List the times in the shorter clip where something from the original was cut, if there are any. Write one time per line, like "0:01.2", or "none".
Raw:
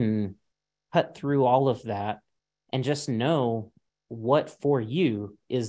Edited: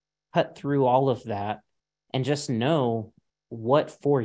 none